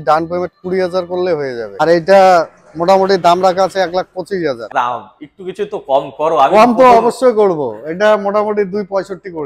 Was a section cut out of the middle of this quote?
yes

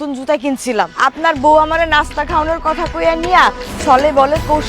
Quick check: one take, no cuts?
no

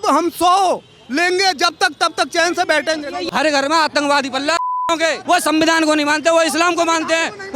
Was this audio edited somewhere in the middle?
yes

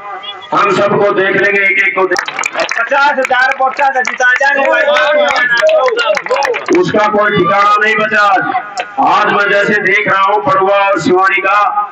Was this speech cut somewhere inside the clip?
yes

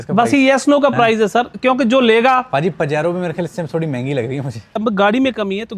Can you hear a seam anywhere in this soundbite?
yes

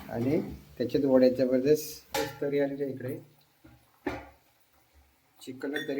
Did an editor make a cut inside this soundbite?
yes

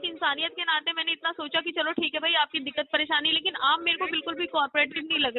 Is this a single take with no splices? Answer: yes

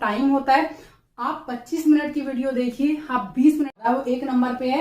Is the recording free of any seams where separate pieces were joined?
no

